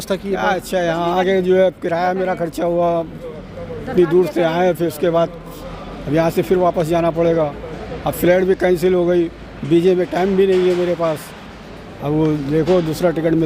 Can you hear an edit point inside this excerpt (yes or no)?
no